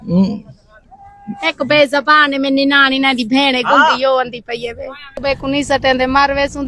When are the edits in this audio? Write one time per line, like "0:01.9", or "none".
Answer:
0:05.2